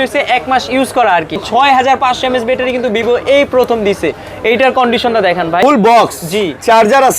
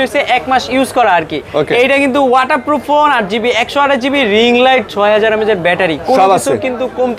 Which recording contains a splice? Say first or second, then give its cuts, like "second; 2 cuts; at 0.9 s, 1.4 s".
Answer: first; 2 cuts; at 1.4 s, 5.6 s